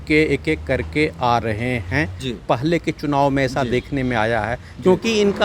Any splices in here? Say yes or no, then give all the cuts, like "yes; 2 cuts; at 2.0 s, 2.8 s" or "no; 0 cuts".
yes; 1 cut; at 2.3 s